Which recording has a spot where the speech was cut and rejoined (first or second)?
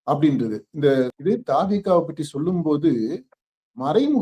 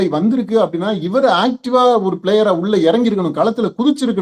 first